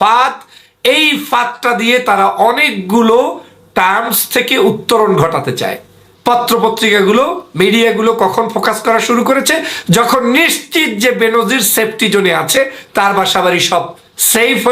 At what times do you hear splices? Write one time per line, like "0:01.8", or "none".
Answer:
0:06.1

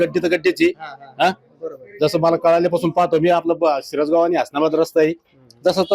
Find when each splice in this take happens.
none

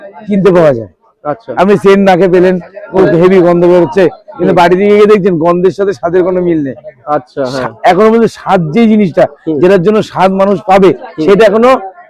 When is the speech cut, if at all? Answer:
none

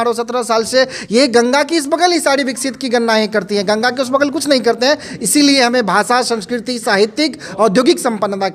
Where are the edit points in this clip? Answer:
none

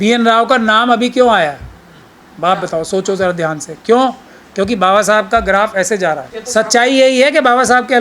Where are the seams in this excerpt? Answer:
0:06.3

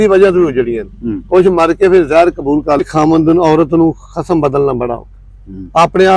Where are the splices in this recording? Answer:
0:02.8

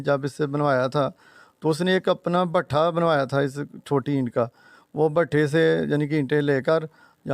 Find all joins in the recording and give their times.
none

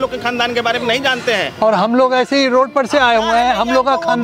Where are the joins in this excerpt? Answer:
none

